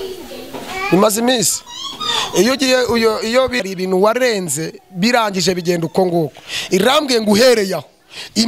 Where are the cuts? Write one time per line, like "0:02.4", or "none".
0:03.6